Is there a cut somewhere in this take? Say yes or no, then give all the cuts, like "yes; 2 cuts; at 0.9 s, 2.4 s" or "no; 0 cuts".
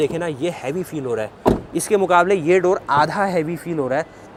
no; 0 cuts